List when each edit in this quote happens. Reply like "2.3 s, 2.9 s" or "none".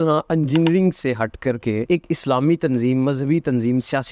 1.9 s